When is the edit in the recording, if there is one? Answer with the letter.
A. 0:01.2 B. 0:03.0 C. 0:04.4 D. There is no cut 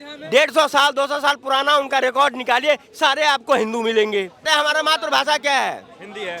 C